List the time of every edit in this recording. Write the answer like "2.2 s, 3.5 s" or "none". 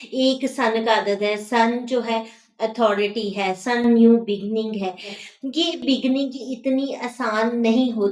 5.1 s